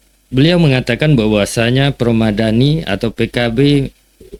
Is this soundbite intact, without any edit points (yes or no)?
yes